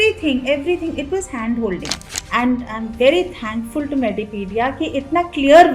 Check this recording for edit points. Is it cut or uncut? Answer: cut